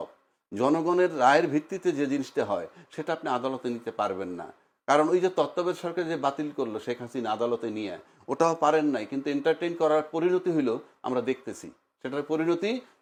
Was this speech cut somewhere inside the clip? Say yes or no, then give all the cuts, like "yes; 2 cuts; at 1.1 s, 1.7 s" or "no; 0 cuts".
no; 0 cuts